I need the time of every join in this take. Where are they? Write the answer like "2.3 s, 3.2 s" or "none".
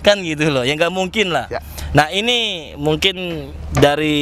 none